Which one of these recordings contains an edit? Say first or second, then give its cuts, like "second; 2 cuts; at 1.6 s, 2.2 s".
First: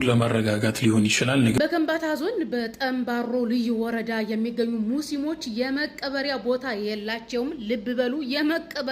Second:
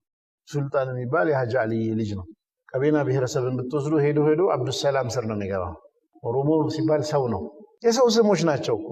first; 1 cut; at 1.6 s